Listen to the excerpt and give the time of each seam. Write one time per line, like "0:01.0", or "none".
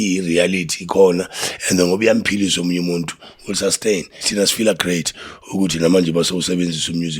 0:04.3